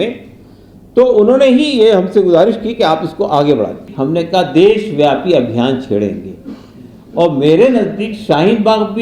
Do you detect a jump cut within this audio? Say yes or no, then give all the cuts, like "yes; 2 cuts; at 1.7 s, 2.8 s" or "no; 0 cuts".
yes; 1 cut; at 3.9 s